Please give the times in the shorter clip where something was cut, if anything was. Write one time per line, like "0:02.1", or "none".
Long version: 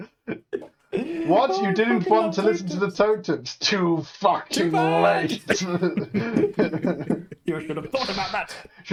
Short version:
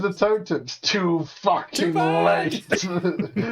none